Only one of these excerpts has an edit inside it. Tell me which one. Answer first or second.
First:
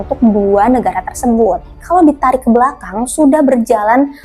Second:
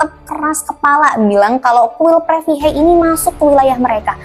first